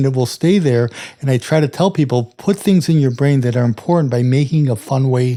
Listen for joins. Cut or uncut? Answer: uncut